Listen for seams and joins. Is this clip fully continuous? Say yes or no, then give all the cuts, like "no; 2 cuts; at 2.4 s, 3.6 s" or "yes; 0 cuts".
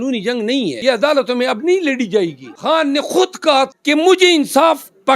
no; 3 cuts; at 0.8 s, 2.5 s, 3.7 s